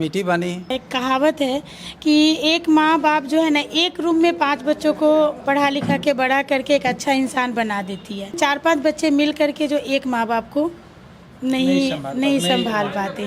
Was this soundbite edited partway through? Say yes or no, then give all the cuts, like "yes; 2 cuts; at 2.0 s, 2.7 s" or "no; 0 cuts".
yes; 2 cuts; at 0.7 s, 8.4 s